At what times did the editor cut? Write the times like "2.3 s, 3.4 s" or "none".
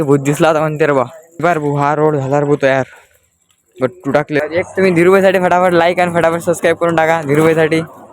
1.2 s, 4.4 s